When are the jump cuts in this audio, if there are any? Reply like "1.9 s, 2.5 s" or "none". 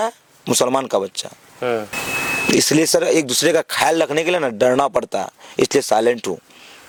none